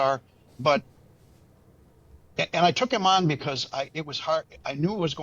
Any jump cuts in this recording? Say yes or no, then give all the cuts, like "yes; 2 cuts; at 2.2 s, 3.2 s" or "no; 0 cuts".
no; 0 cuts